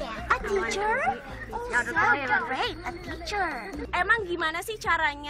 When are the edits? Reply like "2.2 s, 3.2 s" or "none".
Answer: none

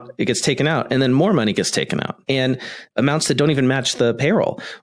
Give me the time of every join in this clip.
2.5 s

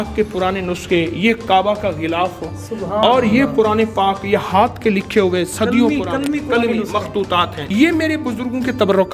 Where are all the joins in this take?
7.6 s

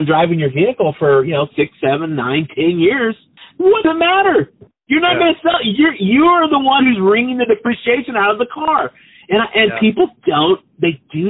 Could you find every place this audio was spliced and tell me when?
3.4 s

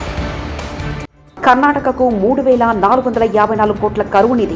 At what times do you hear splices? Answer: 1.2 s

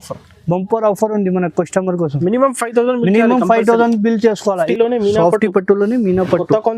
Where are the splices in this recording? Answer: 4.7 s

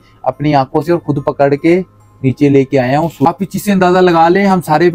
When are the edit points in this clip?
3.2 s

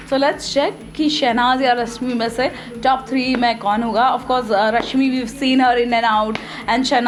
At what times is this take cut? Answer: none

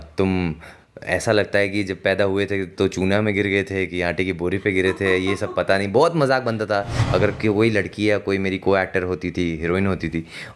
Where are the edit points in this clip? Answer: 7.0 s

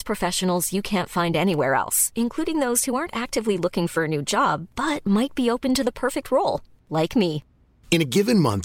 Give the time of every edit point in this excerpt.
none

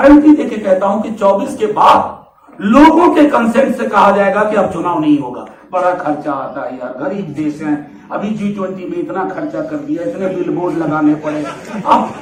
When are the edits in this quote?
none

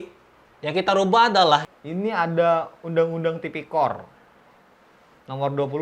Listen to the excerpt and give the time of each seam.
1.7 s

